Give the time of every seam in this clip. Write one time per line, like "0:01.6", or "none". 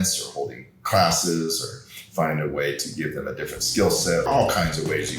0:04.2